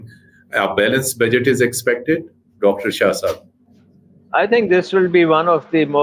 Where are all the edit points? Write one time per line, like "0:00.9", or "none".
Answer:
none